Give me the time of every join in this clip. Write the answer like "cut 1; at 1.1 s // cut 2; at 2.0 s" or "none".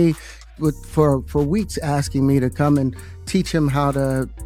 none